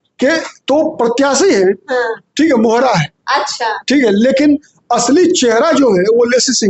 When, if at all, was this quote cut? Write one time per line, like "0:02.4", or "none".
none